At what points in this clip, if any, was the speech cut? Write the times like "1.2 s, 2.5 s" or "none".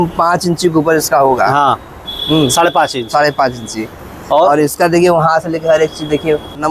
3.9 s

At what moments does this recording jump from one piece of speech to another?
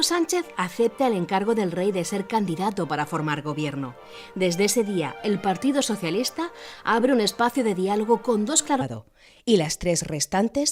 none

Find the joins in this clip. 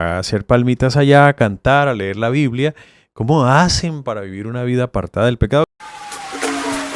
5.7 s

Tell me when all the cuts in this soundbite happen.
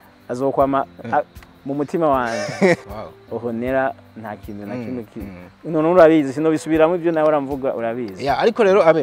2.8 s

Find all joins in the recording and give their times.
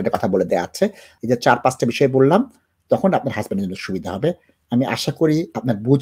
1.1 s

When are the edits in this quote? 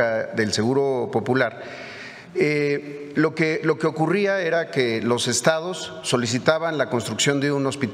none

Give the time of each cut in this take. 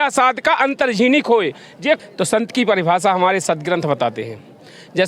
2.0 s

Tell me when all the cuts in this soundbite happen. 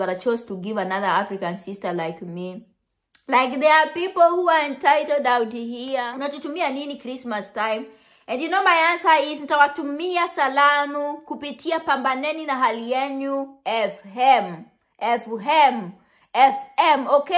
6.1 s

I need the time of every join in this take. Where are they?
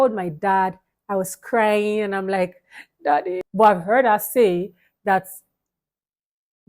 3.4 s

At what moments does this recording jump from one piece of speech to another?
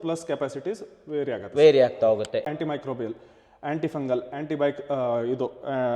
2.5 s

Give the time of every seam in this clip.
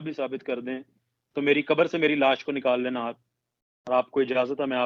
none

